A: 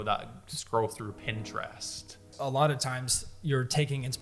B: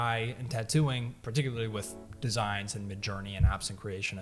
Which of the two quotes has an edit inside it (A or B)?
A